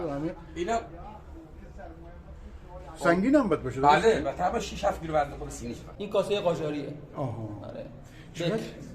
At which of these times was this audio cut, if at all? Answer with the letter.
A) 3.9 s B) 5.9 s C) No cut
B